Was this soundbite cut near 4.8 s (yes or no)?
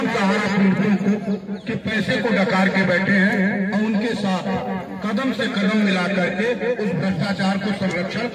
no